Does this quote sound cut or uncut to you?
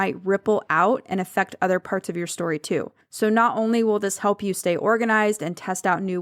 cut